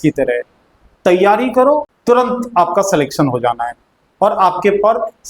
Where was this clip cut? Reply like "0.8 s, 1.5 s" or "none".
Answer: 1.9 s